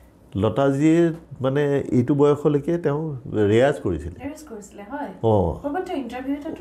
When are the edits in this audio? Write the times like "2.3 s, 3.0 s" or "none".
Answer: none